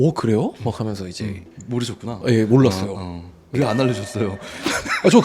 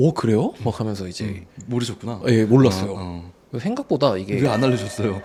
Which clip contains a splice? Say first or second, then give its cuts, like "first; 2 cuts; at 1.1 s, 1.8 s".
first; 1 cut; at 3.5 s